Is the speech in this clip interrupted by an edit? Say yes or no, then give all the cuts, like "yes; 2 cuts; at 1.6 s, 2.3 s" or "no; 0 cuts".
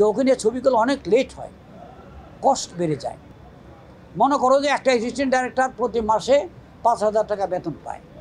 no; 0 cuts